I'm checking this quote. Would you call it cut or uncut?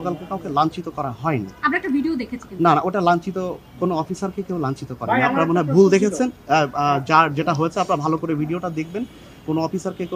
uncut